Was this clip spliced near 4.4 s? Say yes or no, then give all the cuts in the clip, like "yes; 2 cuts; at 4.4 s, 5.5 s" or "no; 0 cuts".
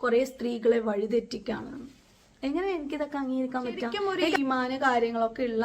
yes; 1 cut; at 4.4 s